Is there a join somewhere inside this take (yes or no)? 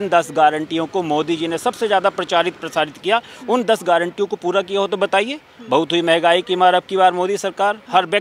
no